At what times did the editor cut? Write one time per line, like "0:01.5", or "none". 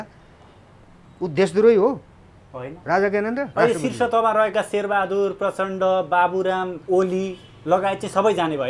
0:03.5
0:06.8